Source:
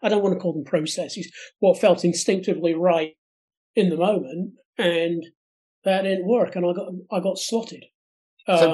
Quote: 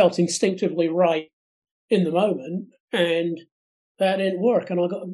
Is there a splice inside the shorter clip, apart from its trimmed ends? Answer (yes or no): no